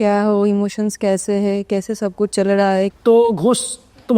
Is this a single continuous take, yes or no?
no